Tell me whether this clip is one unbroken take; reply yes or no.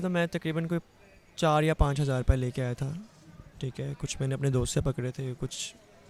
yes